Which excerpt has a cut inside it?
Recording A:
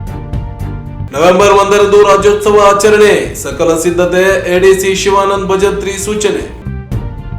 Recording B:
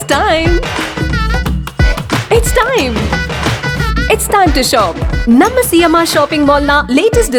A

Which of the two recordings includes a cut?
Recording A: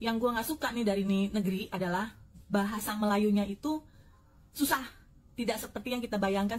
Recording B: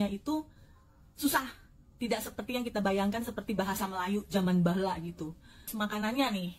B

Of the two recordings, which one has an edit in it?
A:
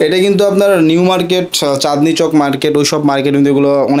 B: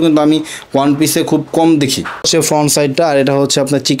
B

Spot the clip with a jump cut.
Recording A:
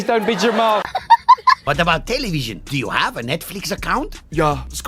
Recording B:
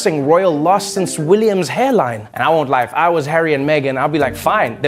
A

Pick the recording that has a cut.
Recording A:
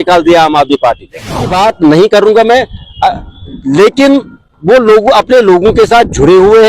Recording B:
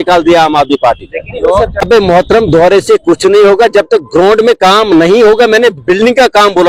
A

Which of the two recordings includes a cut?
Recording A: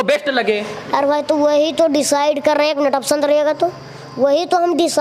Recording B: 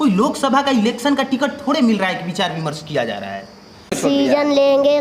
B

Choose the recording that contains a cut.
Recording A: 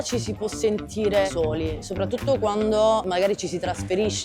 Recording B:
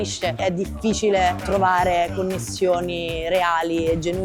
A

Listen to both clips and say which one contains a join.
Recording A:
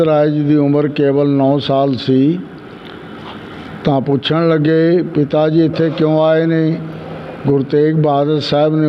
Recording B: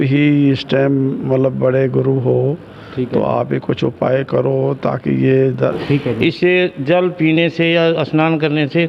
B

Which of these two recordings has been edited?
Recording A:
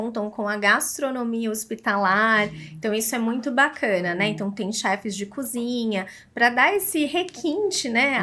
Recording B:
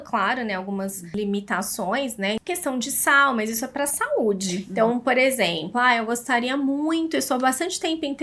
B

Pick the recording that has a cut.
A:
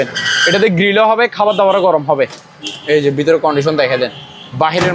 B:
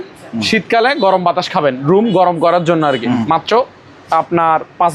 B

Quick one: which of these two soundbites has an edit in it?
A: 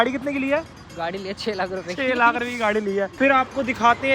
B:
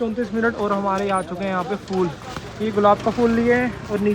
A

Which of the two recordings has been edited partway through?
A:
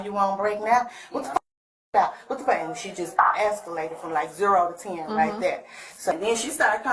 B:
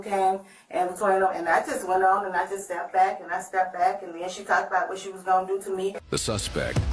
A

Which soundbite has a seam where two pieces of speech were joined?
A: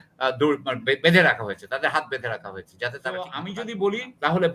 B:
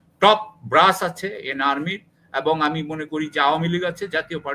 A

